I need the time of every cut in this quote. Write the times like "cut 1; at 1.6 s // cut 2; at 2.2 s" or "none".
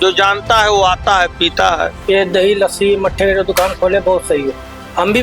cut 1; at 1.9 s